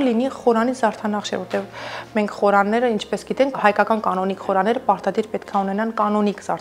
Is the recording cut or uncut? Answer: cut